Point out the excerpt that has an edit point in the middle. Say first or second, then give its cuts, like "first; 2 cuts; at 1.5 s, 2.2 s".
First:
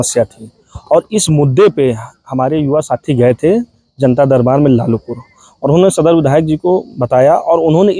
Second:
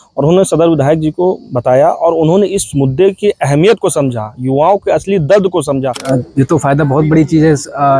second; 1 cut; at 6.0 s